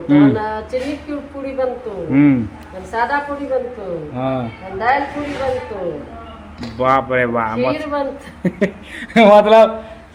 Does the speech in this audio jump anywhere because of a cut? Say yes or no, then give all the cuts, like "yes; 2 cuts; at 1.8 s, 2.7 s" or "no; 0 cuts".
no; 0 cuts